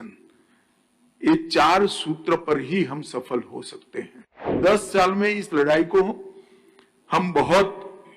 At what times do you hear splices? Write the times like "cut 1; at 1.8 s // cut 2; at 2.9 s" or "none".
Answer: cut 1; at 4.6 s